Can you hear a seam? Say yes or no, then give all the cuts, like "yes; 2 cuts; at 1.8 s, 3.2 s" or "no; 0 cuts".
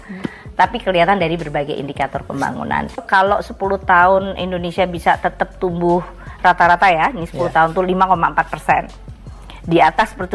yes; 1 cut; at 3.0 s